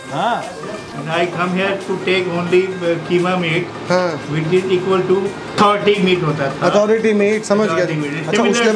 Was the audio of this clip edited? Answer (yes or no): yes